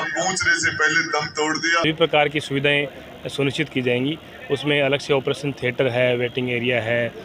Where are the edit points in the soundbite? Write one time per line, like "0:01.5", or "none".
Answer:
0:01.9